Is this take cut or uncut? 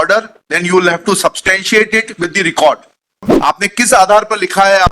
cut